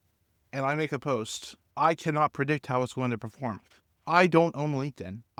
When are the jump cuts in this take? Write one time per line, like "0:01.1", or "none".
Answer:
none